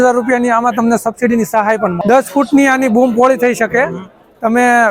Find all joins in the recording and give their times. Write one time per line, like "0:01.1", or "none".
0:02.0